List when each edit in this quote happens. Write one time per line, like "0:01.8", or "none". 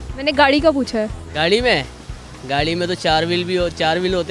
none